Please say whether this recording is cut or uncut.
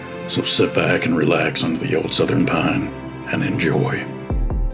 uncut